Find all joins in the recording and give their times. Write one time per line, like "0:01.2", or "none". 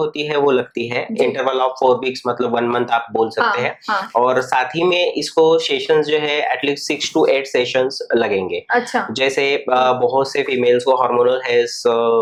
none